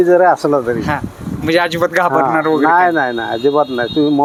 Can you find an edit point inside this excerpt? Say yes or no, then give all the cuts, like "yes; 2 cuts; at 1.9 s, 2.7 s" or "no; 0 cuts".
no; 0 cuts